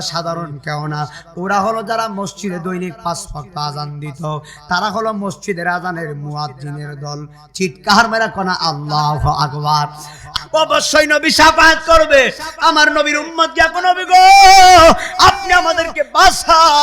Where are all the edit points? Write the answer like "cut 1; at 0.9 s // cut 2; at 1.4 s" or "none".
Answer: cut 1; at 10.2 s